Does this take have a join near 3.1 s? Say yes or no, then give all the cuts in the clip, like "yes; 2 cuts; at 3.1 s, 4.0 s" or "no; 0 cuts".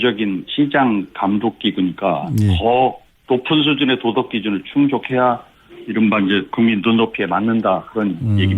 yes; 1 cut; at 3.1 s